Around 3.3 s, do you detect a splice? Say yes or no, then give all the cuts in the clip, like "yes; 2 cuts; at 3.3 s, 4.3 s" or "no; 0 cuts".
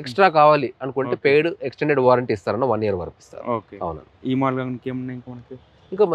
no; 0 cuts